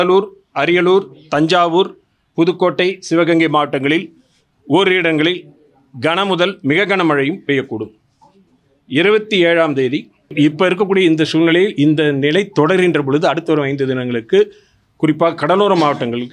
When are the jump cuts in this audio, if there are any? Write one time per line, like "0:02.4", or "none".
0:10.3